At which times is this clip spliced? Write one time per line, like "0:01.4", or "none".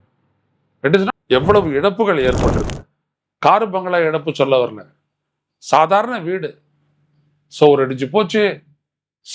0:01.1